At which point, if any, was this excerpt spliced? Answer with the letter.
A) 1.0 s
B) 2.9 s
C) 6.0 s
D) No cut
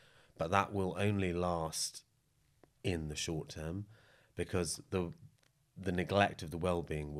D